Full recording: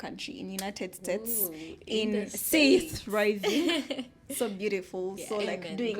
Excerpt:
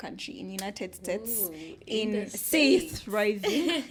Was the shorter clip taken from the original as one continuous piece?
yes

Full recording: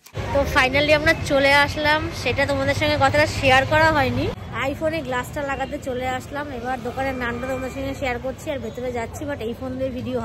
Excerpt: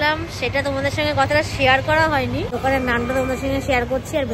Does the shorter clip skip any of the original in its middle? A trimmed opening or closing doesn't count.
yes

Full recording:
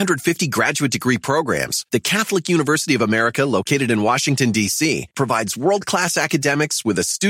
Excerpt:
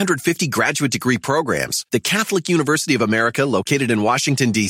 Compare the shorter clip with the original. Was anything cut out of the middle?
no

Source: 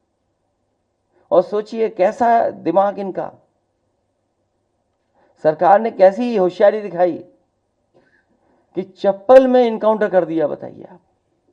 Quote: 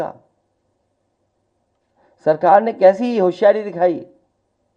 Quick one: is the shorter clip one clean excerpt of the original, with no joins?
yes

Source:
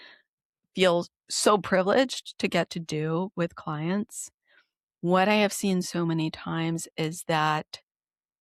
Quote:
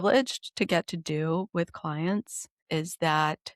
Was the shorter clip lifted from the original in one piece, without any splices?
no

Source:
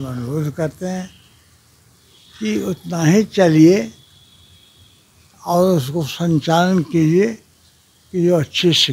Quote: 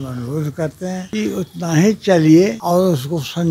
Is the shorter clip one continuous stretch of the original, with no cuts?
no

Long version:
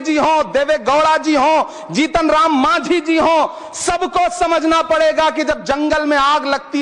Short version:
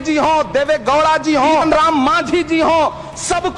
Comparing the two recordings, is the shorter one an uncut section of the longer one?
no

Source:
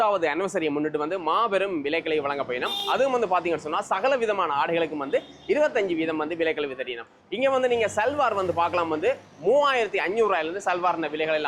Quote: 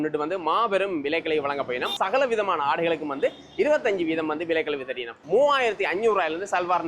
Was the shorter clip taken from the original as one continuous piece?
no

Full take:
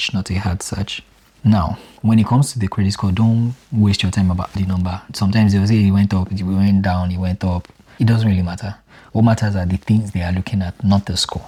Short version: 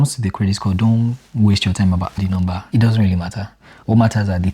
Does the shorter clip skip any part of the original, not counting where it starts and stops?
yes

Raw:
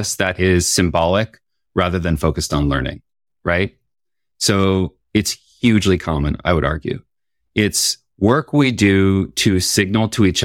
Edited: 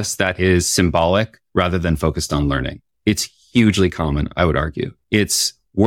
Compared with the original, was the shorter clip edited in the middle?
yes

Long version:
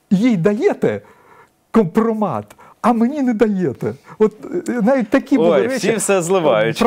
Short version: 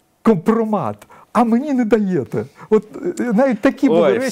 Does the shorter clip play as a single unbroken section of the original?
yes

